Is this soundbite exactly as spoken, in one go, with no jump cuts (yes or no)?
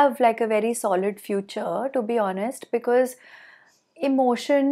yes